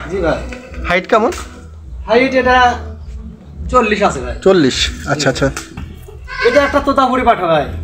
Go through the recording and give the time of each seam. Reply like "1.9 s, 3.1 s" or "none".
5.6 s